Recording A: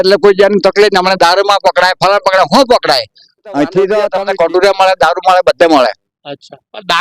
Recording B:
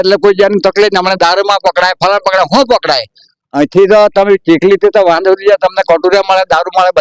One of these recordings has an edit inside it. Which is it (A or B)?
A